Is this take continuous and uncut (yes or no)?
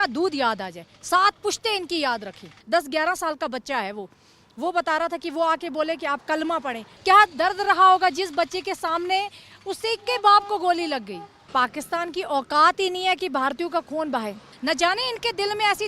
no